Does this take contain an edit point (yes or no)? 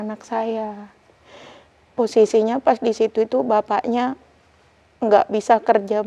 no